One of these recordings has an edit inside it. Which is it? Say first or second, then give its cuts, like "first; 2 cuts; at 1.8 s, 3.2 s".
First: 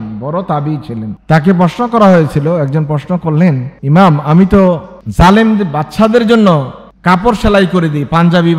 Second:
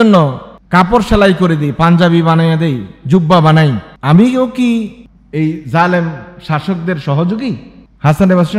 first; 1 cut; at 3.7 s